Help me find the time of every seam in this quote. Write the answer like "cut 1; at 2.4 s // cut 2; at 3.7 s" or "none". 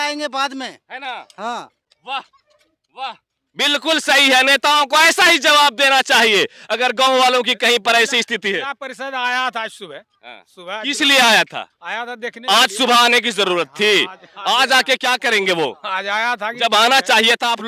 none